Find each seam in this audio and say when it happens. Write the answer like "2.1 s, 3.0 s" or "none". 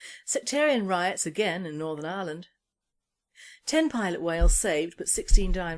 2.1 s